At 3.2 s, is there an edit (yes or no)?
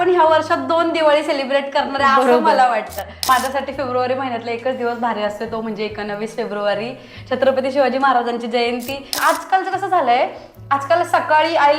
yes